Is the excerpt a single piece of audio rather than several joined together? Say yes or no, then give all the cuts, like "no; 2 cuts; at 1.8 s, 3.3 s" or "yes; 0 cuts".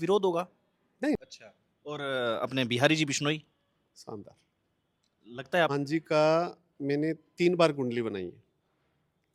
no; 2 cuts; at 1.2 s, 5.7 s